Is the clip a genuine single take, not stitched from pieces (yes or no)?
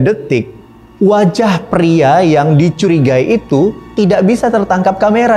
yes